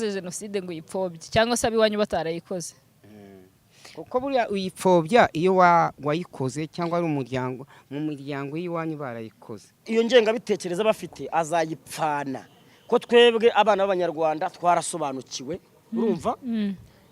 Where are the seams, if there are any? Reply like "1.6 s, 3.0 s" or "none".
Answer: 9.9 s